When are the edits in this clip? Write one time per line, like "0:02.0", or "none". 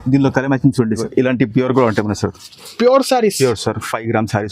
0:01.0